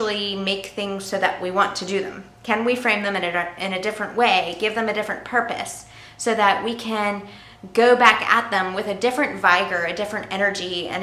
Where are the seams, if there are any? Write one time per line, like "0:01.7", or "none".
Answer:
none